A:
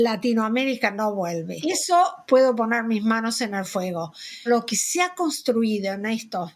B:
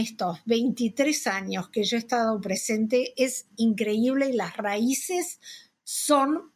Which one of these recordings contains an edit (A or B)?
A